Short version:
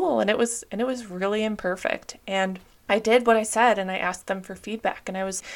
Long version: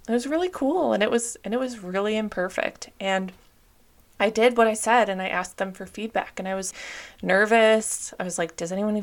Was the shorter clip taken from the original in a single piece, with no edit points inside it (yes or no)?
no